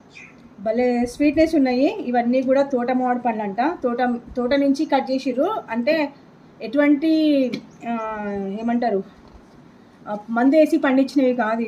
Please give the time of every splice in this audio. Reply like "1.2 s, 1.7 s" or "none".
none